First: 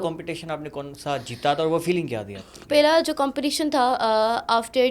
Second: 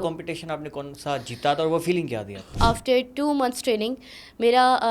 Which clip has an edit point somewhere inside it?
second; 1 cut; at 2.5 s

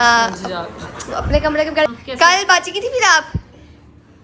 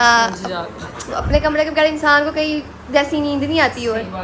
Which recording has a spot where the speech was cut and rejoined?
first; 1 cut; at 1.9 s

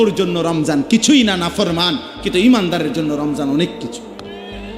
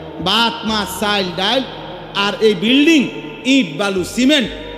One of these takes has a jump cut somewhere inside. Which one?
first; 1 cut; at 3.8 s

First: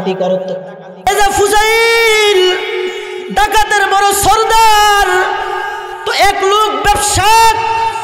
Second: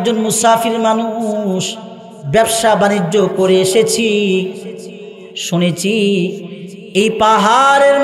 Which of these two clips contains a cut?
first; 1 cut; at 1.1 s

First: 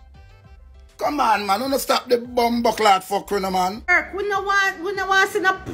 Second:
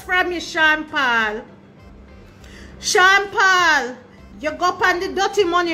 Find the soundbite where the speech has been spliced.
first; 1 cut; at 3.9 s

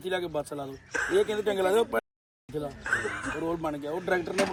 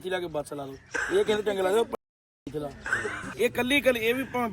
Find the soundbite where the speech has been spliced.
second; 1 cut; at 3.2 s

